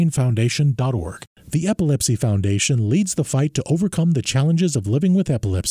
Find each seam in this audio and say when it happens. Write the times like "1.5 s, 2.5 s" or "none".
1.2 s